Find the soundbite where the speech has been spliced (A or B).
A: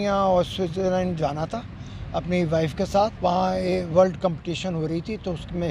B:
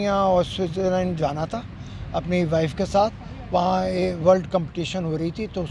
A